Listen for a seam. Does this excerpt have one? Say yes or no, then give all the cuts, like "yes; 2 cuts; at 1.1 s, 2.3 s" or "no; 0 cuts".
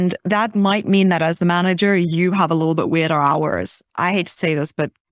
yes; 1 cut; at 3.8 s